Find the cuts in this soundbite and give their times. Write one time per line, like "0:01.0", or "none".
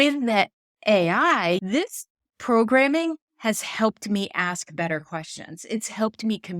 0:01.6